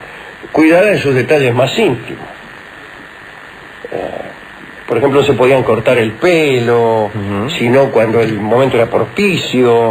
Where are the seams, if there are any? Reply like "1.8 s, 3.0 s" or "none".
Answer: none